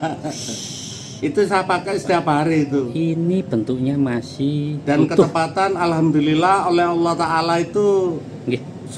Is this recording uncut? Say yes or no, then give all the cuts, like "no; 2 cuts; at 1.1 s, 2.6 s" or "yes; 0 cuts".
yes; 0 cuts